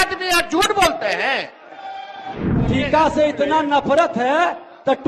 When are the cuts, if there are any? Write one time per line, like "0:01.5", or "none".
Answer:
0:02.6